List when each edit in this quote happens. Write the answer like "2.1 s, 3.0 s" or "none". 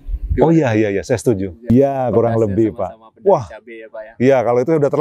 1.7 s